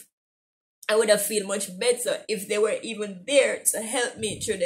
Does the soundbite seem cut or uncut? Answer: uncut